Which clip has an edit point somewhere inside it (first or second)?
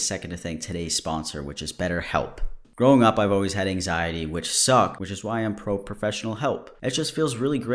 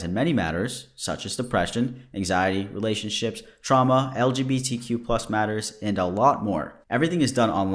first